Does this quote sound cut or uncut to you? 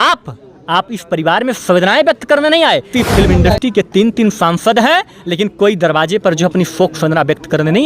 cut